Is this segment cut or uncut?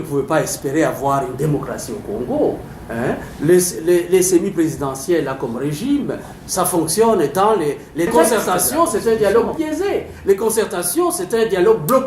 cut